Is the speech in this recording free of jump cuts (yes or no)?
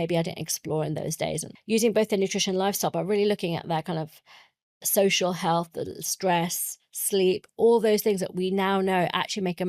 no